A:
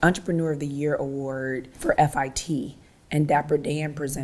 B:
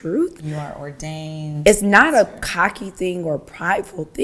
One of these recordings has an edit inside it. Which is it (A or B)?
A